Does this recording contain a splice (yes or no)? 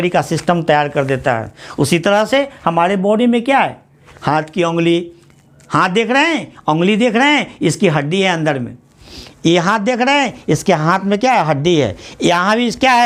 no